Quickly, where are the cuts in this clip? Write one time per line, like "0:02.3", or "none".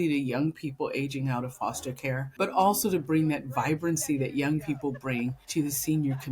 0:02.3
0:05.4